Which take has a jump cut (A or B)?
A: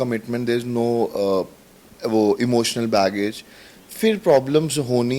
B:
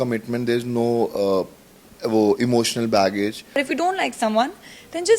B